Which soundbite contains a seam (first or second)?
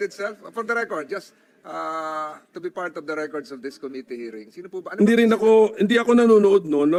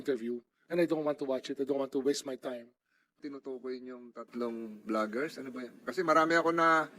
second